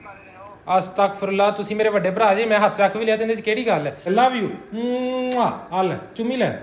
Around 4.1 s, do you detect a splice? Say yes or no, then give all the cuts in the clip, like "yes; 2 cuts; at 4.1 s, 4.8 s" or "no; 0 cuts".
yes; 1 cut; at 4.1 s